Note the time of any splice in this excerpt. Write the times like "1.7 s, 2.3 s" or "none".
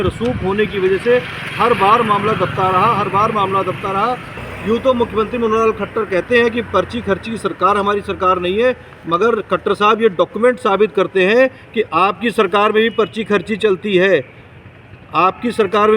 4.4 s